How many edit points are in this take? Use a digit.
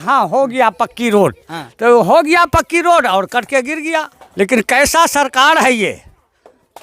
1